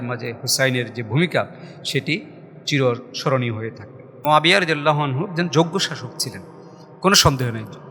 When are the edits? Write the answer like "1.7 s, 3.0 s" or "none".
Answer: 4.1 s